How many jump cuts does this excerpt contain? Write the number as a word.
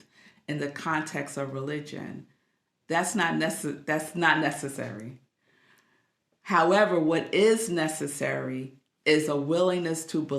zero